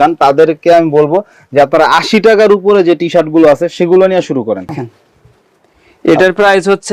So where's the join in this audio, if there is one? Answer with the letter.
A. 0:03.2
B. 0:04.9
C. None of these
B